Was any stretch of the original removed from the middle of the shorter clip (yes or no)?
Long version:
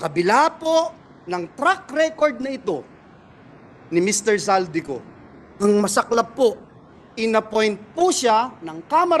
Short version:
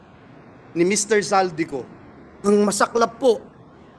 no